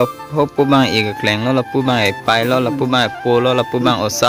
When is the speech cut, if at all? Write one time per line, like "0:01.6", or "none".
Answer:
none